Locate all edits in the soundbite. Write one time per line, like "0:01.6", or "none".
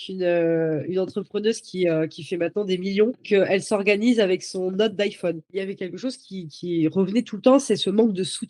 0:05.6